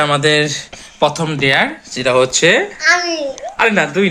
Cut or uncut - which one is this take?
uncut